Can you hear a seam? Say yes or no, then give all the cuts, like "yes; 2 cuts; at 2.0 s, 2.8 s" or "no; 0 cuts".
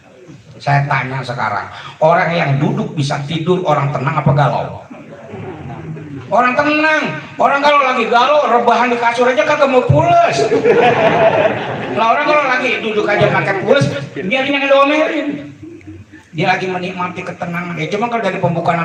no; 0 cuts